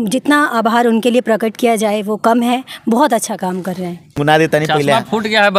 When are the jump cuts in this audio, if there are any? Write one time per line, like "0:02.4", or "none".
0:04.2